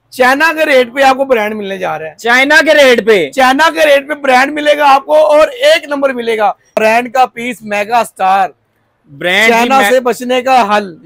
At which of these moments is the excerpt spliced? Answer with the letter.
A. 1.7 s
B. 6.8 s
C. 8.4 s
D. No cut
B